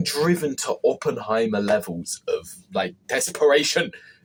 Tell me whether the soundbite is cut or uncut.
uncut